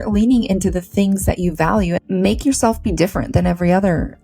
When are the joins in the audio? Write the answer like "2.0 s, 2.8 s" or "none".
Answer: 2.0 s